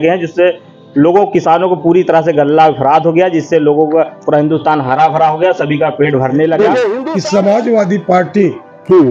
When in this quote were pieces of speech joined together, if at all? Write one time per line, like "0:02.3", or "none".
0:07.1